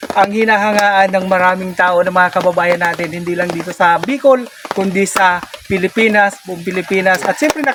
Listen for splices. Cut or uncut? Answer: uncut